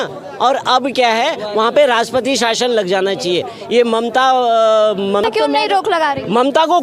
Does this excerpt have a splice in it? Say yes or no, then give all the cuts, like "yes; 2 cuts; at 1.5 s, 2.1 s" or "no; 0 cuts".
yes; 1 cut; at 5.2 s